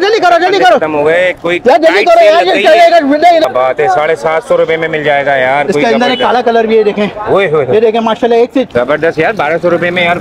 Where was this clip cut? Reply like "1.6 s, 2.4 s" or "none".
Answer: 3.5 s, 8.7 s